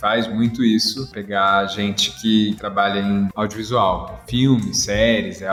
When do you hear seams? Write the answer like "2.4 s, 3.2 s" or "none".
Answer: none